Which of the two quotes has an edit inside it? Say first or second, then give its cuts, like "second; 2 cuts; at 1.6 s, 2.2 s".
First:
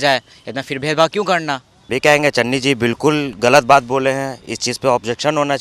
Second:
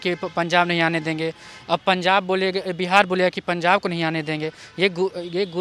first; 1 cut; at 1.7 s